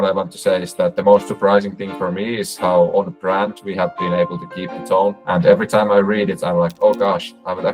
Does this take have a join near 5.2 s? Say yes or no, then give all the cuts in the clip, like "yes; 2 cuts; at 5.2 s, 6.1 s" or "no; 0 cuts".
yes; 2 cuts; at 1.0 s, 5.2 s